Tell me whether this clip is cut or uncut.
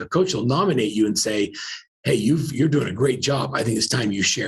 uncut